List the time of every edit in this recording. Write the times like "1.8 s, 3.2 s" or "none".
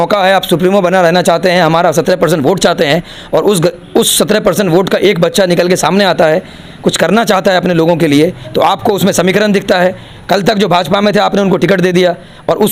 none